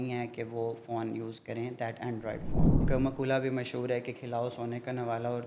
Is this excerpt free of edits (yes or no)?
no